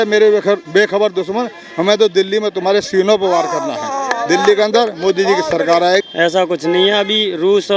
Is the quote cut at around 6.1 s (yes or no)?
yes